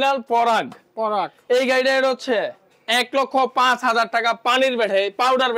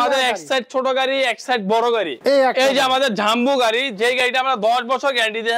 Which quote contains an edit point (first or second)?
second